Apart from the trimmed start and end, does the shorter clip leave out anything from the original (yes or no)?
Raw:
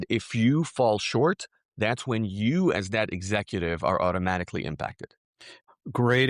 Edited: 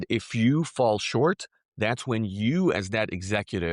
no